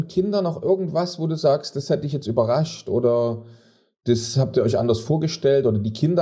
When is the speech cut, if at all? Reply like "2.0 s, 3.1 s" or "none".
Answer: none